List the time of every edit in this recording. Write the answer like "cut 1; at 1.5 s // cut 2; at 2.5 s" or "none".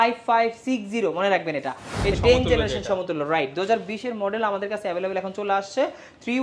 cut 1; at 2.1 s